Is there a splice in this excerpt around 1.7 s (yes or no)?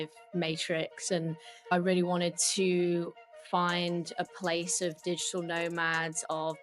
yes